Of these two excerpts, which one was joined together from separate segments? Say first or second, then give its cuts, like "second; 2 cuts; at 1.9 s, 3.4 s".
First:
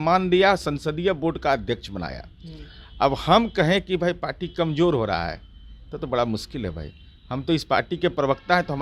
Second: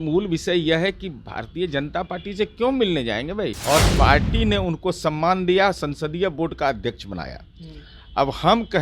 second; 1 cut; at 3.6 s